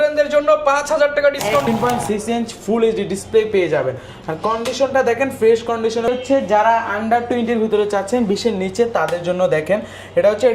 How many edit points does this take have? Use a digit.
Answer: 2